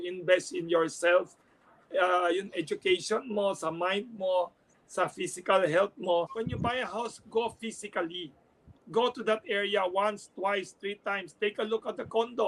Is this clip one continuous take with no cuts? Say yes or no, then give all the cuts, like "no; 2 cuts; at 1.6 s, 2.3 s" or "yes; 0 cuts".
no; 1 cut; at 6.3 s